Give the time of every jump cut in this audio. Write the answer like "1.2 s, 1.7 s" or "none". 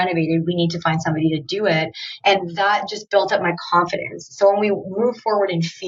none